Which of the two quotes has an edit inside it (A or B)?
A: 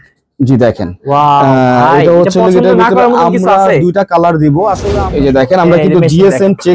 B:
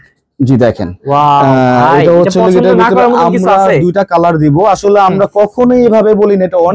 A